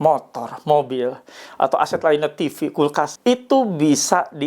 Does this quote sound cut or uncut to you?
cut